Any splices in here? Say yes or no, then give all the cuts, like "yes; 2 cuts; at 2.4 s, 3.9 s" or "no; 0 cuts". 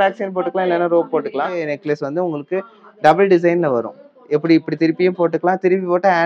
yes; 1 cut; at 1.6 s